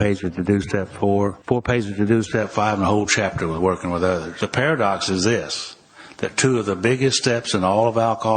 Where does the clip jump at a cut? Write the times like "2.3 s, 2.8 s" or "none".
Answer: 1.4 s, 4.4 s